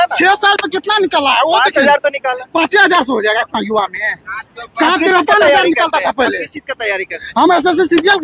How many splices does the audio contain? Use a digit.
0